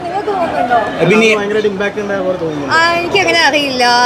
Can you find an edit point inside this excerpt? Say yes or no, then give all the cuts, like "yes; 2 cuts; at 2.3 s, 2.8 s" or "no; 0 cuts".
no; 0 cuts